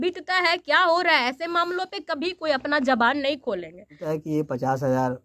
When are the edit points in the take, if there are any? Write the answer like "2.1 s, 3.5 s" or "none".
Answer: 4.1 s